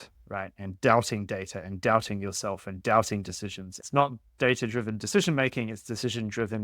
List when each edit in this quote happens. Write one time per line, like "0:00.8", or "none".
0:03.8